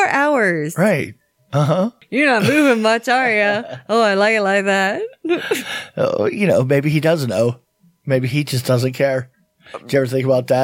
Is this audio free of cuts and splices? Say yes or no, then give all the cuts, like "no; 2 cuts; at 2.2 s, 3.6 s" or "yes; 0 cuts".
no; 1 cut; at 2.0 s